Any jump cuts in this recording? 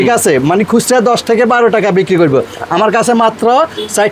no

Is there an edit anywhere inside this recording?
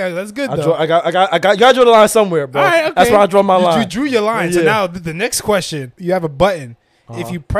yes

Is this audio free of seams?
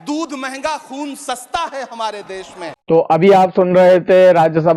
yes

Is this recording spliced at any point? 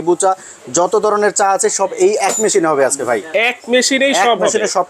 no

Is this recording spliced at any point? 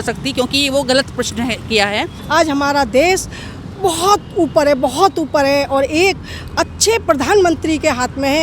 yes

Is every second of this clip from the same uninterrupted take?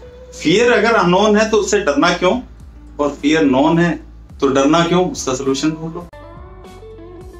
no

